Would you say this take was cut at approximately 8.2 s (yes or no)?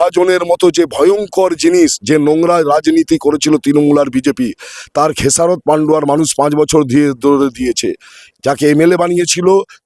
no